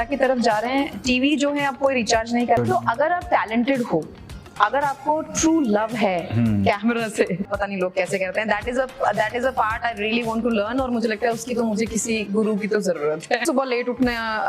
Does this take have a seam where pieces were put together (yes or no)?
yes